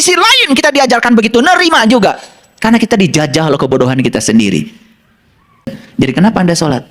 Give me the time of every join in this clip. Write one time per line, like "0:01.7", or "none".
0:05.8